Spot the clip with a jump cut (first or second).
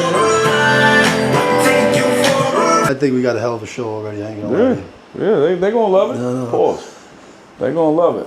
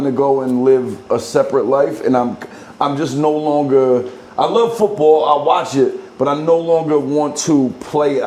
first